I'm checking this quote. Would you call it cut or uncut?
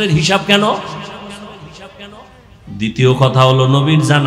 cut